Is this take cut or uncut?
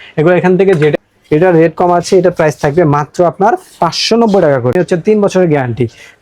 cut